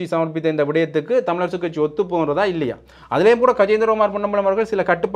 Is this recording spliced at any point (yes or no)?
no